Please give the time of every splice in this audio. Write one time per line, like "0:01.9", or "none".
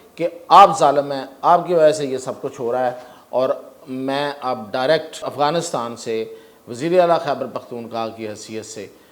0:05.2